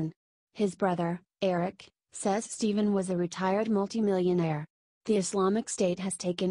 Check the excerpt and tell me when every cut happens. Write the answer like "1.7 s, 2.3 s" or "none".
5.2 s